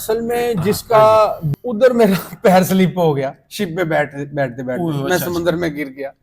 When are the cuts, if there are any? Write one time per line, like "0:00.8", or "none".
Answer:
0:01.5